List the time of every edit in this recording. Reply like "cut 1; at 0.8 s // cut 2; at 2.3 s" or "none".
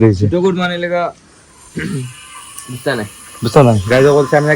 none